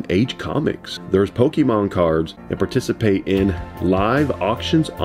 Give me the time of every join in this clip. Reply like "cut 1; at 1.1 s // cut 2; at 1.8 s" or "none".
cut 1; at 0.9 s // cut 2; at 2.4 s